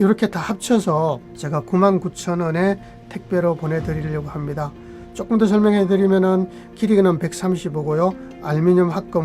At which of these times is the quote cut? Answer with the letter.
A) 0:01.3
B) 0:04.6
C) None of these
A